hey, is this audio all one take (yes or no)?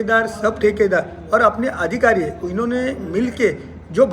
yes